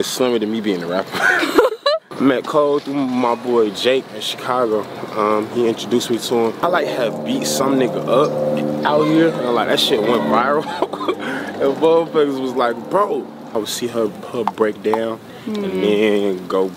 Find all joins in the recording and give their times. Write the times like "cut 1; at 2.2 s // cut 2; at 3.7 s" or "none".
cut 1; at 2.1 s // cut 2; at 6.6 s // cut 3; at 13.5 s